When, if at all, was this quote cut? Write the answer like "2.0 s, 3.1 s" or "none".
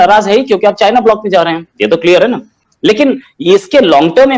none